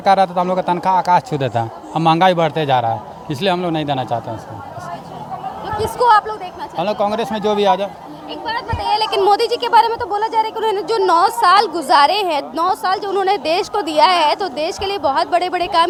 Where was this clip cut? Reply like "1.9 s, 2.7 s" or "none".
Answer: none